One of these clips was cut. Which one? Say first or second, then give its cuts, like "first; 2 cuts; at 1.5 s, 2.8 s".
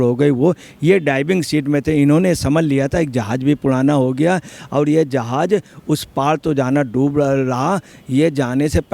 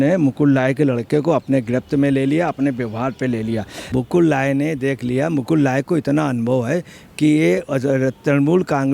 second; 1 cut; at 3.9 s